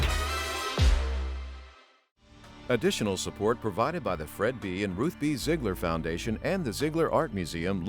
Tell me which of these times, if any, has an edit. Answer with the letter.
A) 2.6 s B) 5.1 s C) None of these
A